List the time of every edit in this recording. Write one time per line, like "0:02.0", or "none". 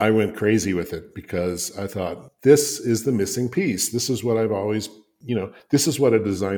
none